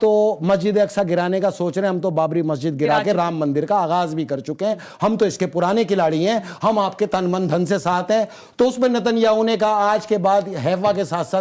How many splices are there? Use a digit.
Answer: 0